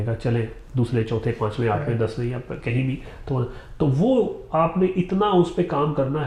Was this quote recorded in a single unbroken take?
yes; 0 cuts

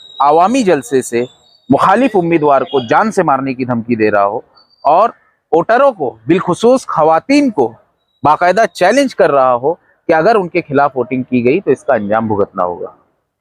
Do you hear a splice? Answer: no; 0 cuts

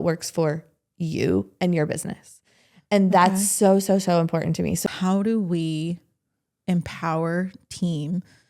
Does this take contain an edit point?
yes; 1 cut; at 4.8 s

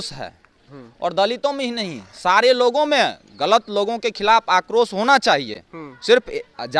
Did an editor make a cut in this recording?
no; 0 cuts

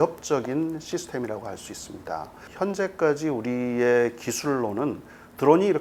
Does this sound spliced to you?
no; 0 cuts

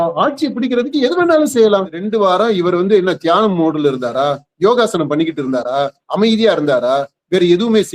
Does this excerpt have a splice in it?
yes; 1 cut; at 2.1 s

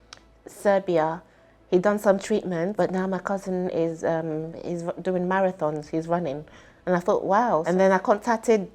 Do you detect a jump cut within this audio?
yes; 2 cuts; at 2.7 s, 7.6 s

